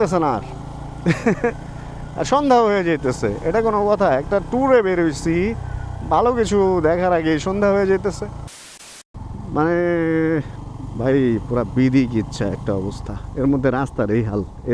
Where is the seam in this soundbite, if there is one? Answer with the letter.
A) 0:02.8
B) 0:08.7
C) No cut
B